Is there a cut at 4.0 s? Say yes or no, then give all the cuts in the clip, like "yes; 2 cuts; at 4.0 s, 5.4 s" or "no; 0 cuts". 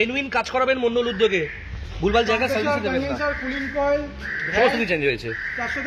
no; 0 cuts